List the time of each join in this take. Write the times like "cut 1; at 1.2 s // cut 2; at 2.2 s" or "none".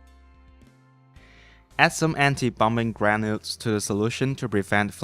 cut 1; at 1.7 s